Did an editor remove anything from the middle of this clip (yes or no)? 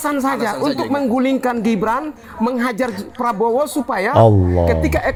no